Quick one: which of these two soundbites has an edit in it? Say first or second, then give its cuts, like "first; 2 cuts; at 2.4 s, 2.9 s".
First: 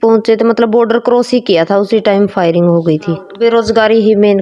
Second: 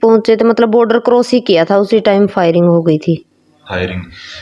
first; 1 cut; at 3.3 s